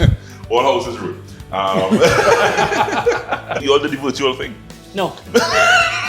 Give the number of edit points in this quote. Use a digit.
1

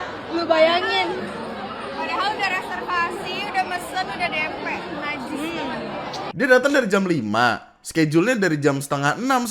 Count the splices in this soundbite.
1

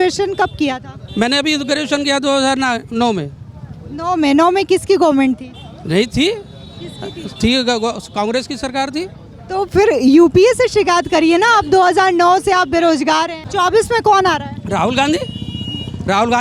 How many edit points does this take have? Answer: 1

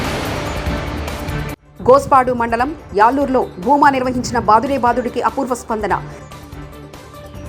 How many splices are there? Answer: 1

